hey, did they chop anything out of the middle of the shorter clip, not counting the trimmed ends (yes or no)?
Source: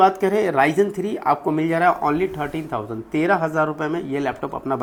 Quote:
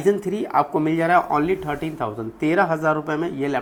no